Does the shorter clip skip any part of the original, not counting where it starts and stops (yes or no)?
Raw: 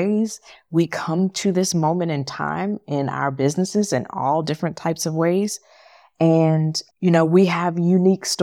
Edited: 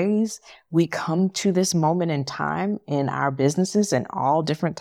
no